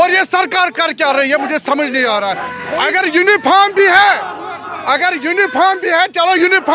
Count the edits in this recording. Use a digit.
1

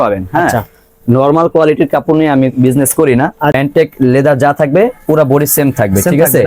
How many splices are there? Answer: 1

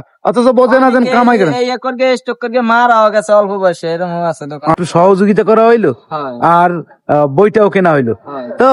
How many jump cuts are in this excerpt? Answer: 1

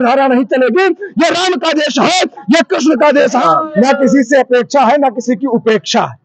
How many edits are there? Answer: 1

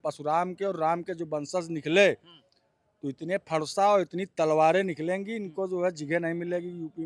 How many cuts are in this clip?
0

